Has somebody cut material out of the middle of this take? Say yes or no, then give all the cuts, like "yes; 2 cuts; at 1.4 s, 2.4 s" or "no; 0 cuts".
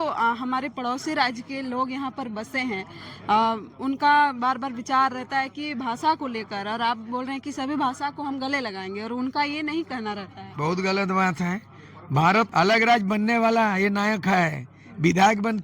yes; 1 cut; at 12.5 s